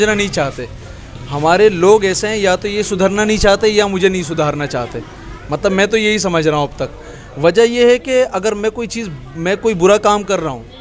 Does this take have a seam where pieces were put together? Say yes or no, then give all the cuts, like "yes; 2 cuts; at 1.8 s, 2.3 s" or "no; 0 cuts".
no; 0 cuts